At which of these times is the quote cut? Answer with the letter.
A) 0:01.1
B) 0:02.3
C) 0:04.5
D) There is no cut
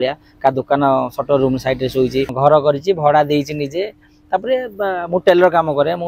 B